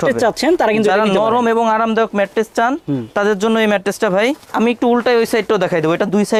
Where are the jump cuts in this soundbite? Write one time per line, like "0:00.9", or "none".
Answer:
none